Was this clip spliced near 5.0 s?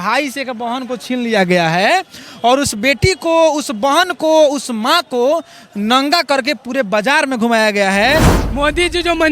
no; 1 cut; at 8.4 s

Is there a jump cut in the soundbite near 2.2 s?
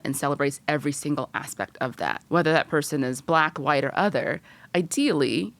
yes; 1 cut; at 2.2 s

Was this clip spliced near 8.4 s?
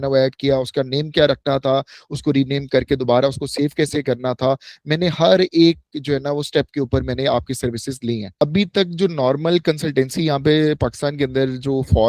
yes; 1 cut; at 8.4 s

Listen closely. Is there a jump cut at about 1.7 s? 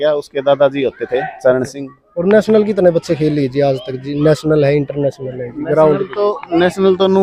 yes; 1 cut; at 1.7 s

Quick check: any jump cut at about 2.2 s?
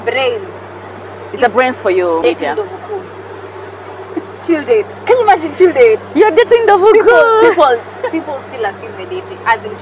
yes; 1 cut; at 2.2 s

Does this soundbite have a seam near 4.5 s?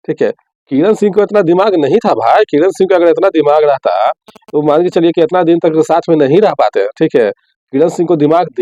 no; 0 cuts

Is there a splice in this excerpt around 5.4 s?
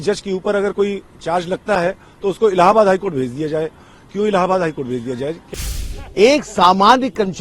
yes; 1 cut; at 5.4 s

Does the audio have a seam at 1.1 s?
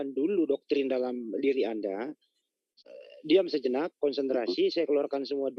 no; 1 cut; at 2.7 s

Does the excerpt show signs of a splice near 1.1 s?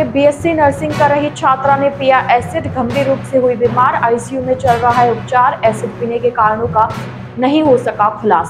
no; 0 cuts

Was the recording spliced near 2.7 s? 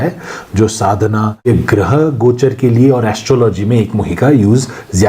no; 1 cut; at 1.5 s

